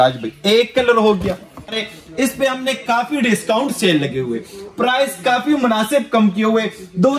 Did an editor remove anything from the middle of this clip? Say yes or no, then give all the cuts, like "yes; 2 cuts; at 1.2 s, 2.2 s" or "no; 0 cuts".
yes; 1 cut; at 1.8 s